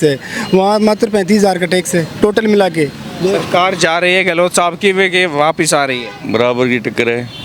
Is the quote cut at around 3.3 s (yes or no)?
yes